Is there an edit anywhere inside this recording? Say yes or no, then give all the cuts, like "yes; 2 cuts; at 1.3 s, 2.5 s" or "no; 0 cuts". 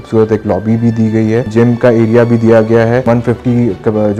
yes; 2 cuts; at 1.5 s, 3.0 s